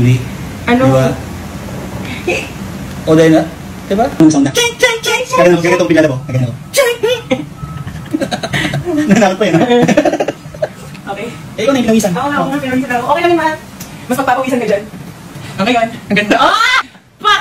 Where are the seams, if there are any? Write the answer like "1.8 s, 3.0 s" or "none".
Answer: 4.2 s